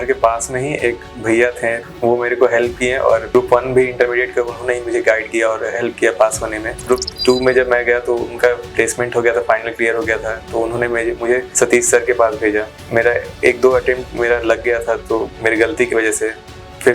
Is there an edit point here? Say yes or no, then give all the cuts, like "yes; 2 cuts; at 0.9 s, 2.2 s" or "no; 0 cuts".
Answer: yes; 5 cuts; at 1.8 s, 3.3 s, 6.8 s, 11.5 s, 12.8 s